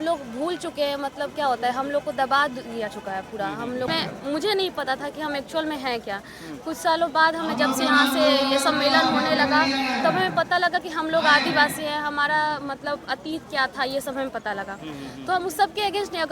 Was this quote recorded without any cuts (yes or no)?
no